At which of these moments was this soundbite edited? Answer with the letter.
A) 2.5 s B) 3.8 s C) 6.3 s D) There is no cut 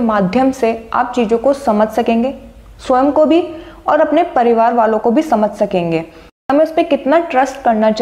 C